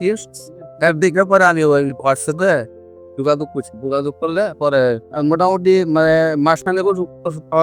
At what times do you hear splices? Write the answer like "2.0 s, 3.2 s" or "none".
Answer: 5.1 s